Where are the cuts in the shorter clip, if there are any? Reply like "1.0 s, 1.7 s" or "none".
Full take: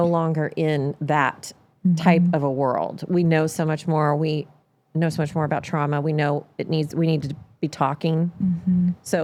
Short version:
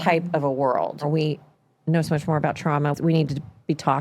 1.0 s, 2.9 s

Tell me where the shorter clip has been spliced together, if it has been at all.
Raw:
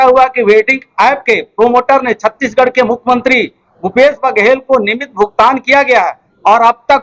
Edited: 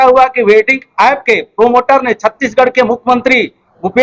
none

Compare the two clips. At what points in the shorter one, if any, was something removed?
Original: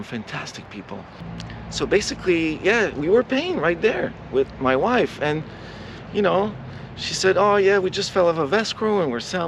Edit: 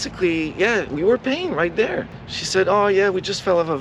2.1 s

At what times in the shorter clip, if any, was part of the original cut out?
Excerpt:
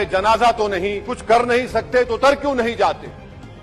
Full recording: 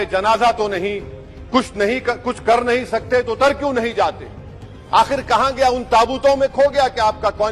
1.1 s

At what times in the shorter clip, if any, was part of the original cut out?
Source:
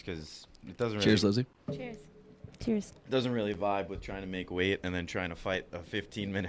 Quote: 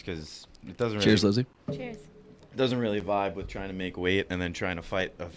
2.4 s

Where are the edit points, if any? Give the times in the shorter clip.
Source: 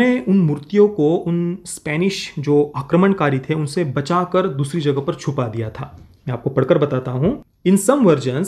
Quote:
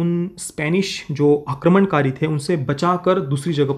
none

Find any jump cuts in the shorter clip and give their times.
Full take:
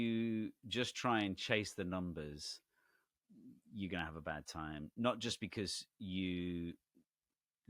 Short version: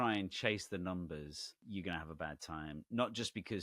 1.5 s

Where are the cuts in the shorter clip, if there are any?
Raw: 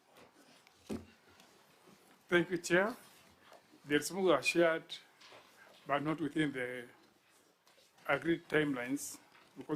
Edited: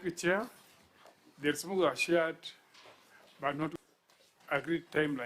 3.7 s

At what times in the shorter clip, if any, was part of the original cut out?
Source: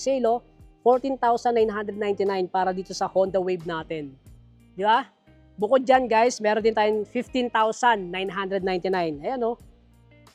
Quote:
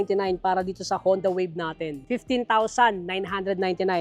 2.0 s

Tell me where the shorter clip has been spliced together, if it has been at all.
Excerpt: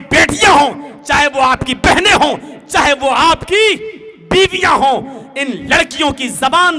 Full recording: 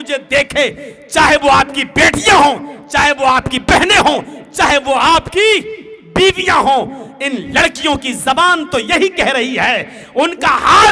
none

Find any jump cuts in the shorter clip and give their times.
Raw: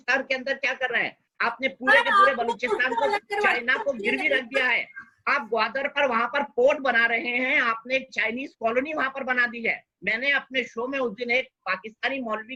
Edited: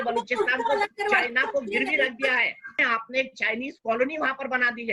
2.8 s

